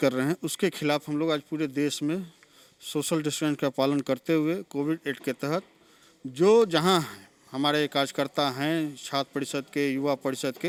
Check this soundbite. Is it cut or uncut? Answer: uncut